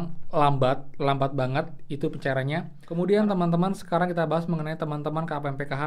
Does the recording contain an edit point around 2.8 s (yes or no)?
yes